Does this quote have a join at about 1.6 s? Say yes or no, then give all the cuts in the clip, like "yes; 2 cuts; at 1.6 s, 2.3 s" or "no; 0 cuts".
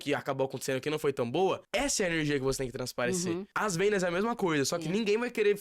yes; 2 cuts; at 1.6 s, 3.5 s